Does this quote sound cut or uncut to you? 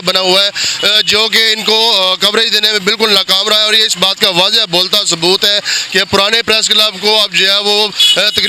uncut